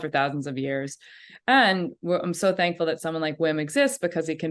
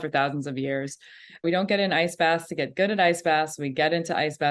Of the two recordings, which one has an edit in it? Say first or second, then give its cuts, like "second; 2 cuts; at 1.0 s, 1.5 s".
second; 1 cut; at 1.4 s